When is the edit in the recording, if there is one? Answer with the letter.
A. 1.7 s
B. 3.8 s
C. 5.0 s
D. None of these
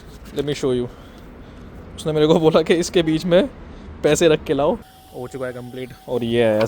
C